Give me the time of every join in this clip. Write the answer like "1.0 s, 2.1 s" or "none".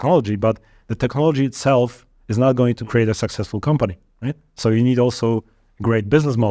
none